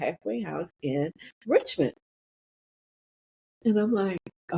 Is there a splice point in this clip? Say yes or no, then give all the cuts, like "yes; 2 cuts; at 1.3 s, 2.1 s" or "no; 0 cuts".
no; 0 cuts